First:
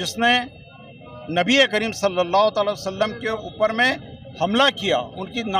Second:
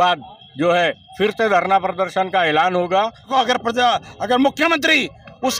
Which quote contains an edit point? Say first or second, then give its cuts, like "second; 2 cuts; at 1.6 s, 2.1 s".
second; 1 cut; at 3.3 s